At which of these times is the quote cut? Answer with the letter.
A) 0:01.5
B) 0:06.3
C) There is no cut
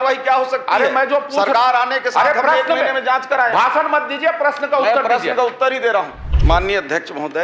B